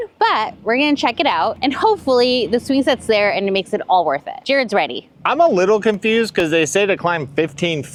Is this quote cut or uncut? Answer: uncut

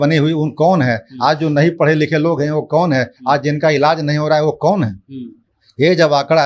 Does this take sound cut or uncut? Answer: uncut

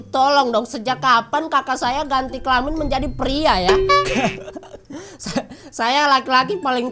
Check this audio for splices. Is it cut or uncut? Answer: uncut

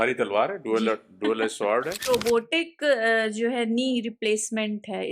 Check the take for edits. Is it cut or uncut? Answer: cut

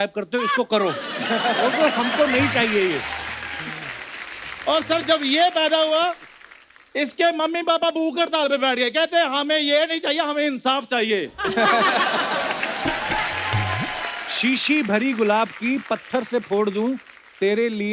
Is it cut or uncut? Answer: cut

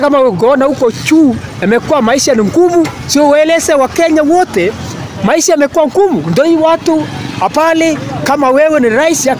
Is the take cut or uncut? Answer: uncut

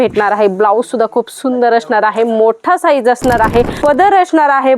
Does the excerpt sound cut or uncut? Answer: cut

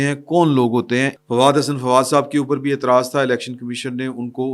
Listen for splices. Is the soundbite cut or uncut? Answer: cut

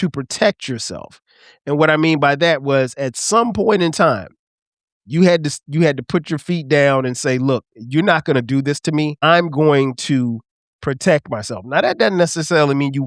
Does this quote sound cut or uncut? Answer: cut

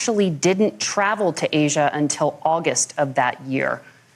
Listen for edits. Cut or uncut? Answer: uncut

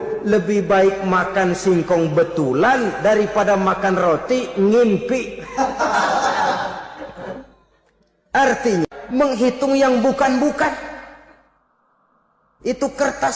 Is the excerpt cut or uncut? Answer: cut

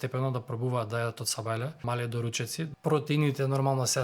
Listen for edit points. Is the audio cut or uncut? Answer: cut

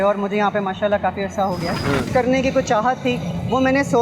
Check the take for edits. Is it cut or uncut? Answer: cut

